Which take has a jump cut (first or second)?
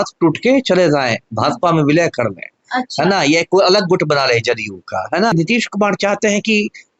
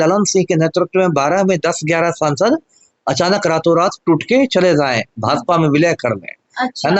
first